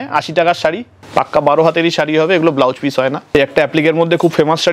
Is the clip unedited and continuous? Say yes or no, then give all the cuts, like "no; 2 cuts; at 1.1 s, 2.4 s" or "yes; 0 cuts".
no; 2 cuts; at 0.9 s, 3.3 s